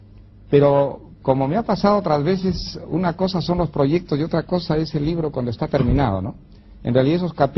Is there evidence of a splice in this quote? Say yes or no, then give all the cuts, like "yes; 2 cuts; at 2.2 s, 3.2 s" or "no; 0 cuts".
yes; 1 cut; at 2.8 s